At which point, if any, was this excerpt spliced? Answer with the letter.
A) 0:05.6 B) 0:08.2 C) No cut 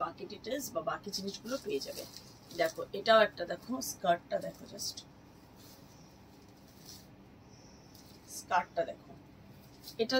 C